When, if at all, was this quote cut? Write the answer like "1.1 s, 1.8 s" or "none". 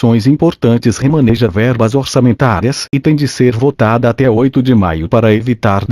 0.9 s